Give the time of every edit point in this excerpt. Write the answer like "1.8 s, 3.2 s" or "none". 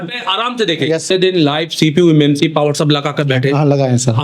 1.1 s

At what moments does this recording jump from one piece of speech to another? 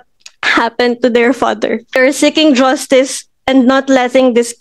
2.0 s

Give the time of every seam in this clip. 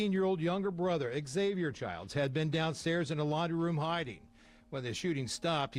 none

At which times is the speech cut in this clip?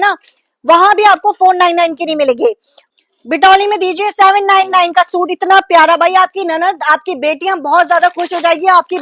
2.8 s

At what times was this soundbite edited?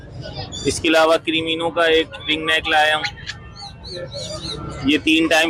none

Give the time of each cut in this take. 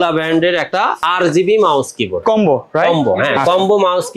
1.0 s

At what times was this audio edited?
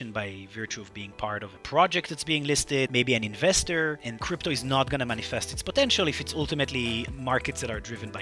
2.9 s, 4.1 s, 7.1 s

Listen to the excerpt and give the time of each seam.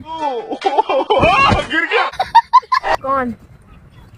2.9 s

